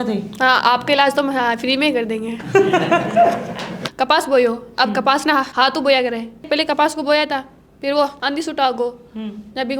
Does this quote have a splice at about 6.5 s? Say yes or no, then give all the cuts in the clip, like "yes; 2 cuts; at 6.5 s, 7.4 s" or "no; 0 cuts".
yes; 3 cuts; at 3.8 s, 6.5 s, 8.2 s